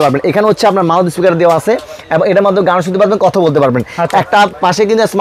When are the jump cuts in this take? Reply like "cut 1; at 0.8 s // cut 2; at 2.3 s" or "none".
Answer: none